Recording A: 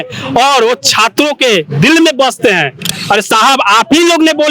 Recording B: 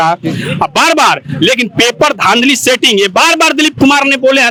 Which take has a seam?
A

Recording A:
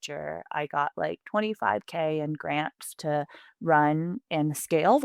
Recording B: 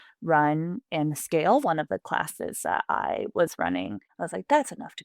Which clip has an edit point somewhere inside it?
B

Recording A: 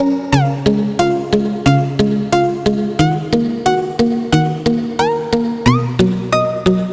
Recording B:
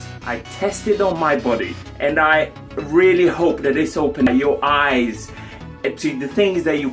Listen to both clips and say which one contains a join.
B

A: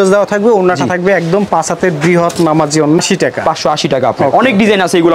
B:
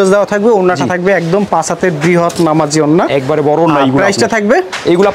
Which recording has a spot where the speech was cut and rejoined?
A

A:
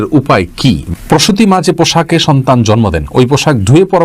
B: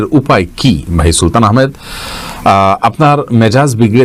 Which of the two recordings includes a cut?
A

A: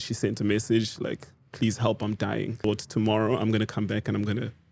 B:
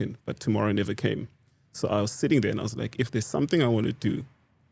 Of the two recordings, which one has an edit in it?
A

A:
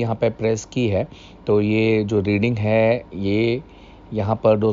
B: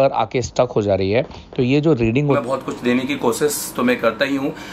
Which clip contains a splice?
B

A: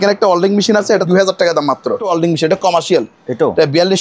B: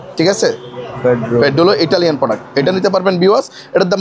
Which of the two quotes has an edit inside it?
A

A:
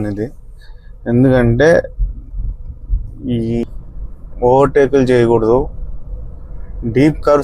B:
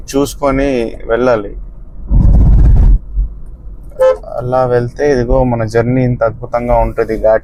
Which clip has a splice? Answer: A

